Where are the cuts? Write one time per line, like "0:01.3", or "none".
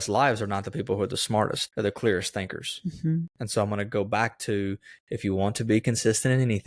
0:01.6